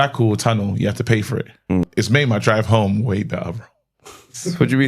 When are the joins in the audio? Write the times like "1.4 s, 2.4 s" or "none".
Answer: 1.9 s